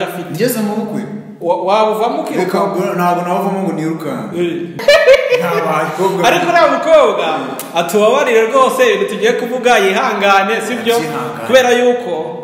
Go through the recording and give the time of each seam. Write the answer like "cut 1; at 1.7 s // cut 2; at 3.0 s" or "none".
cut 1; at 4.8 s